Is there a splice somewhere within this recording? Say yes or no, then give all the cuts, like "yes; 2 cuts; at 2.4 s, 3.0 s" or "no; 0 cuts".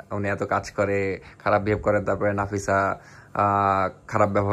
no; 0 cuts